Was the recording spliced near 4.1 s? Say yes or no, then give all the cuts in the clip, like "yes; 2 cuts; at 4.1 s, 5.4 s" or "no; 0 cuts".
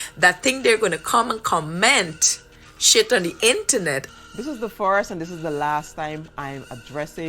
yes; 1 cut; at 4.1 s